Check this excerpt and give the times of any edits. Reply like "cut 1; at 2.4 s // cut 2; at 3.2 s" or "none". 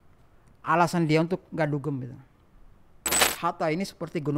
cut 1; at 3.3 s